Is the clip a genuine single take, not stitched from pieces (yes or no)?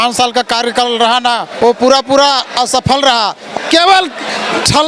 no